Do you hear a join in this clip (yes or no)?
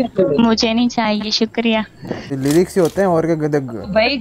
yes